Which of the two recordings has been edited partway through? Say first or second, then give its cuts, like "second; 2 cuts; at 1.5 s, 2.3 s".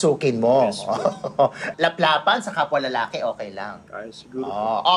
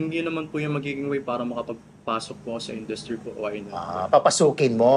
first; 1 cut; at 1.7 s